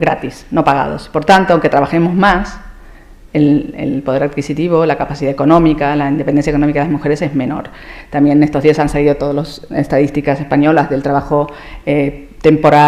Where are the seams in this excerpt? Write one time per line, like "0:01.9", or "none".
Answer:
none